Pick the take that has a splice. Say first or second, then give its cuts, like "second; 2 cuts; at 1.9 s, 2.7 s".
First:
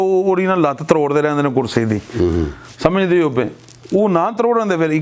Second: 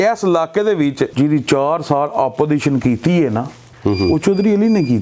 second; 2 cuts; at 1.1 s, 3.6 s